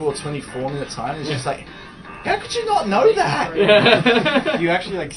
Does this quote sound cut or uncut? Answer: uncut